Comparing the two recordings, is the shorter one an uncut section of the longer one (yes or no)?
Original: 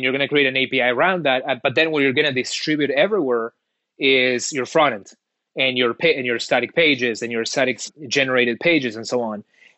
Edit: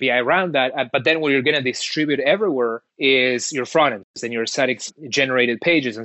no